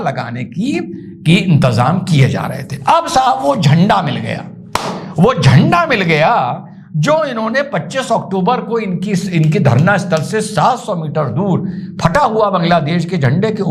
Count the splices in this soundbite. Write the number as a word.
zero